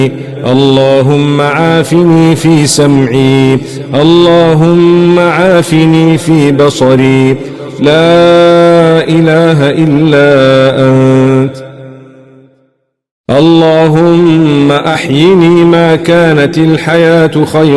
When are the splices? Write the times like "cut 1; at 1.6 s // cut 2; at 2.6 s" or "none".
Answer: none